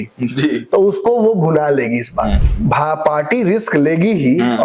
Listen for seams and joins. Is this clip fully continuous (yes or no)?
no